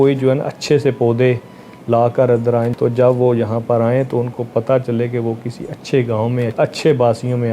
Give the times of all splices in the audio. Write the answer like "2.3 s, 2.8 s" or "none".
2.7 s, 6.5 s